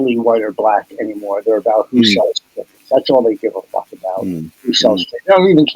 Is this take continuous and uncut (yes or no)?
yes